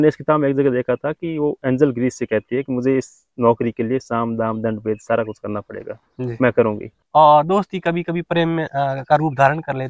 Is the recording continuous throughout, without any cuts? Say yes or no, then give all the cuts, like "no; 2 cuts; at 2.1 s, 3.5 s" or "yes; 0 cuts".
no; 1 cut; at 6.9 s